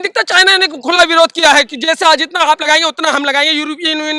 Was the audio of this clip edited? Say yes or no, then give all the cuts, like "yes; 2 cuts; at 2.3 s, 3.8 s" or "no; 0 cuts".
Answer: no; 0 cuts